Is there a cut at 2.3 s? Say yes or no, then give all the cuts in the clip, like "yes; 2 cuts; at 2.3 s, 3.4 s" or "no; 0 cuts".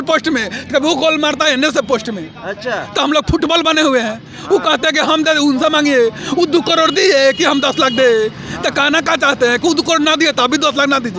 no; 0 cuts